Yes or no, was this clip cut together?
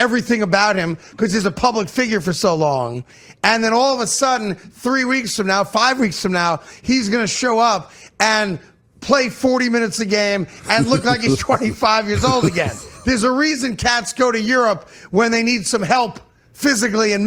no